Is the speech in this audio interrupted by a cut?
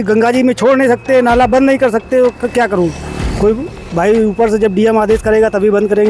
no; 0 cuts

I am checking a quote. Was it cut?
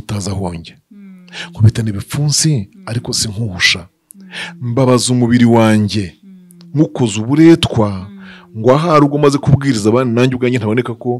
no; 0 cuts

